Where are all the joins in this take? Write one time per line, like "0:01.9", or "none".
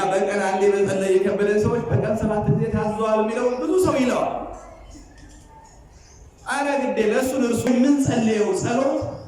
0:07.7